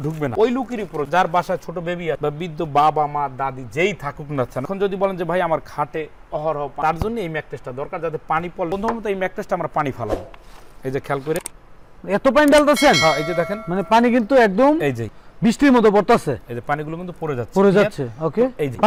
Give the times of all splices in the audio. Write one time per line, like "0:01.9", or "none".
none